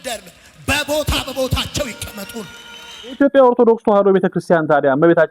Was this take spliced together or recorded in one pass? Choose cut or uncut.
cut